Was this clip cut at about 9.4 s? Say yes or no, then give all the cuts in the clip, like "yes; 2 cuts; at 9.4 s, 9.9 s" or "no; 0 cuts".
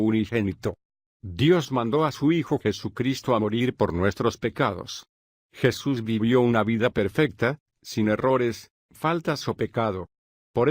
yes; 1 cut; at 9.4 s